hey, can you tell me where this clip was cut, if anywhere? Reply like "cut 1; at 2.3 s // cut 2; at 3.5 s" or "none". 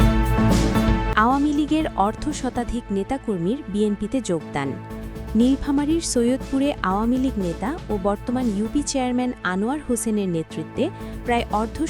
cut 1; at 1.1 s